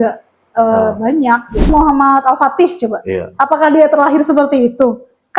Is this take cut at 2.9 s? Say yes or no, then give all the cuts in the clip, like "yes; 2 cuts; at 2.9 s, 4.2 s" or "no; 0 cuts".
no; 1 cut; at 1.7 s